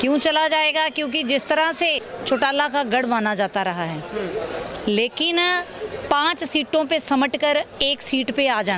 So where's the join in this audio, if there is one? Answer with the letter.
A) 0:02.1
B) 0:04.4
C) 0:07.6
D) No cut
A